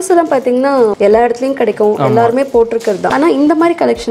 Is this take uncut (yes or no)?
no